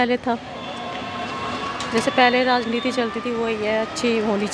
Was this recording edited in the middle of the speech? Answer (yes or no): no